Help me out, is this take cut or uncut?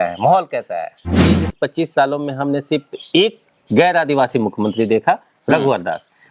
cut